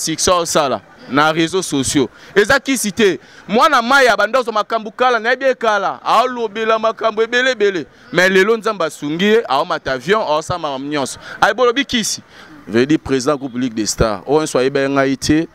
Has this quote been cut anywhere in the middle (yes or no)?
yes